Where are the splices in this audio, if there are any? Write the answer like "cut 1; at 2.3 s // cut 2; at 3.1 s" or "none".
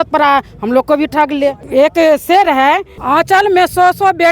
cut 1; at 1.6 s // cut 2; at 2.9 s